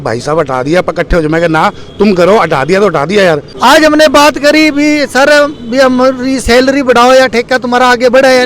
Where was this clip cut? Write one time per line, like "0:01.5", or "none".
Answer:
0:03.5